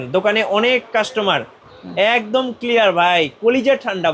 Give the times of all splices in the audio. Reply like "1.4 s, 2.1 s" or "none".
none